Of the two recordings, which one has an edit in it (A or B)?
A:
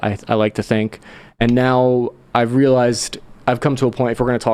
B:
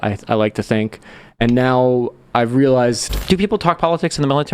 B